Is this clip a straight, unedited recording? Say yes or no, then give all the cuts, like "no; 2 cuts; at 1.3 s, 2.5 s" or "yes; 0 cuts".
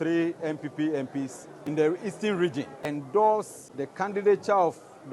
no; 3 cuts; at 1.5 s, 2.8 s, 4.1 s